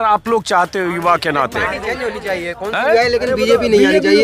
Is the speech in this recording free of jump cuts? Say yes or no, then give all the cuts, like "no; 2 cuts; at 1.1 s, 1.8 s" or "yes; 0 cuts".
yes; 0 cuts